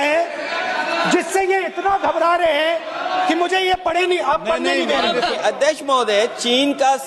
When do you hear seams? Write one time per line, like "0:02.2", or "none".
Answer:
0:05.4